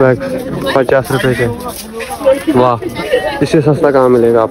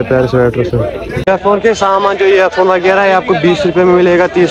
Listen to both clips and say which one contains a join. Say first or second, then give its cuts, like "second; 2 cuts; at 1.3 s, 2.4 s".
second; 1 cut; at 1.1 s